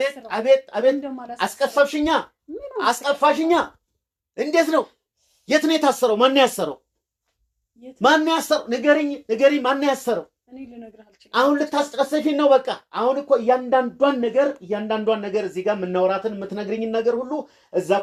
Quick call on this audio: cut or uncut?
uncut